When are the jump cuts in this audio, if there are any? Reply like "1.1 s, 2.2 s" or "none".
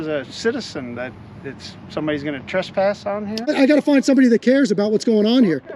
3.5 s